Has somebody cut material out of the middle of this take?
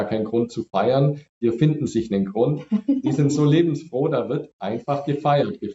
no; 0 cuts

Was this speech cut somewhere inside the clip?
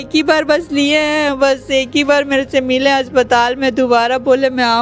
no; 0 cuts

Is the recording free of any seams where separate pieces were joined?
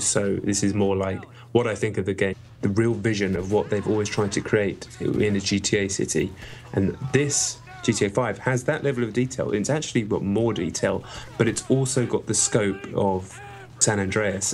yes; 0 cuts

